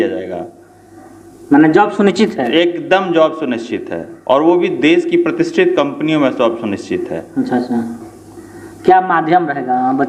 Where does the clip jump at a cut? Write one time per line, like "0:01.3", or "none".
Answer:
none

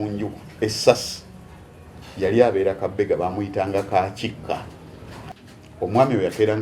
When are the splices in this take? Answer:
0:05.2

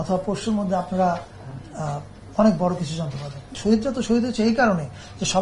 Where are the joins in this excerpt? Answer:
0:03.5

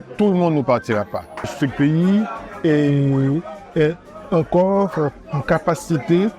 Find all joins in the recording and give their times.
0:01.5

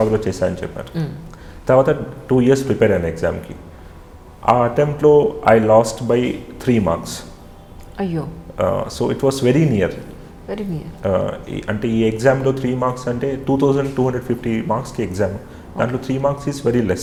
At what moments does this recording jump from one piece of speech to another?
none

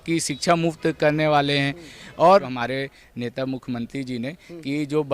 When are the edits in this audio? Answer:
0:02.5

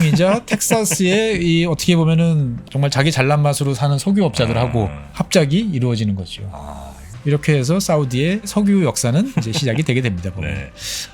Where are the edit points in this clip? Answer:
0:02.7
0:05.0
0:08.5

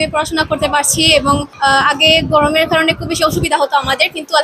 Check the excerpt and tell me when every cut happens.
0:01.5

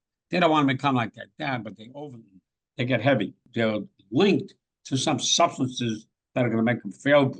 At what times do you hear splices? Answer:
0:03.5

